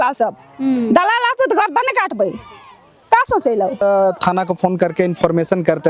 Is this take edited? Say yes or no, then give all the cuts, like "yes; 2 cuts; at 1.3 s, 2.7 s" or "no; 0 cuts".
yes; 1 cut; at 3.8 s